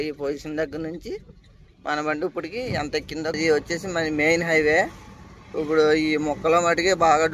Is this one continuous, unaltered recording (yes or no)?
no